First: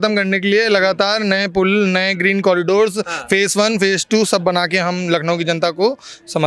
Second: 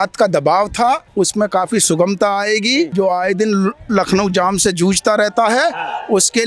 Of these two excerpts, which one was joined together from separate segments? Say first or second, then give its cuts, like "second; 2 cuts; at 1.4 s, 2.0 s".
second; 2 cuts; at 1.1 s, 2.9 s